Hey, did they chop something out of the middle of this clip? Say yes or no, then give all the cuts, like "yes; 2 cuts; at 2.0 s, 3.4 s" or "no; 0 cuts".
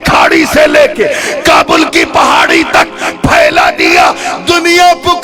no; 0 cuts